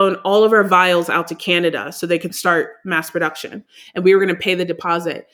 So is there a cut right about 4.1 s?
no; 1 cut; at 2.3 s

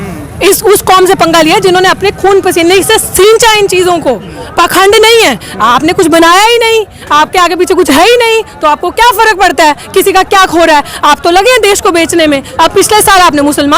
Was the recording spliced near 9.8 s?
no; 1 cut; at 12.5 s

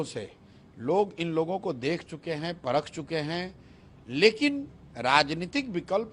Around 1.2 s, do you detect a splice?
no; 0 cuts

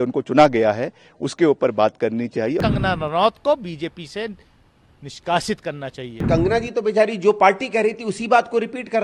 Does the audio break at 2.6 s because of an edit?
yes; 2 cuts; at 2.6 s, 6.2 s

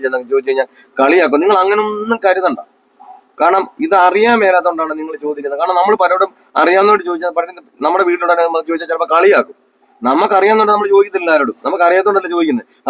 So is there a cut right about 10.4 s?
no; 0 cuts

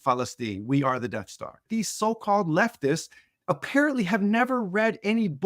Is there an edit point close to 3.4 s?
no; 1 cut; at 1.7 s

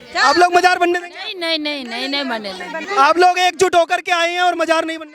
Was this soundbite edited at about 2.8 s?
yes; 1 cut; at 2.8 s

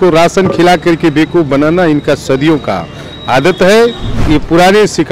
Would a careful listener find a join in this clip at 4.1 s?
yes; 1 cut; at 4.1 s

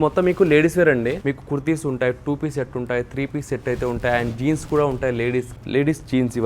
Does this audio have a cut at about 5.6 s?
yes; 2 cuts; at 1.2 s, 5.6 s

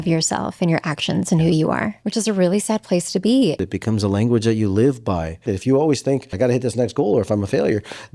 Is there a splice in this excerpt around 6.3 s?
yes; 4 cuts; at 2.0 s, 3.6 s, 5.5 s, 6.3 s

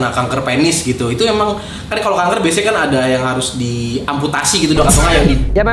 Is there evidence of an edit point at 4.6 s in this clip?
no; 0 cuts

